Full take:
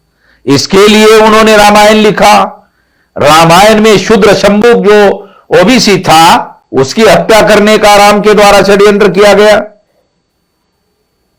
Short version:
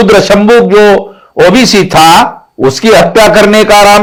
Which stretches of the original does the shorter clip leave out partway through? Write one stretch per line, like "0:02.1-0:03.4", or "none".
none